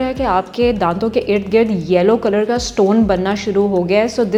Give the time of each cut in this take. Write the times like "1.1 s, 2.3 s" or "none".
none